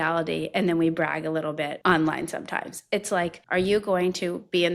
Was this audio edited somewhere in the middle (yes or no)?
yes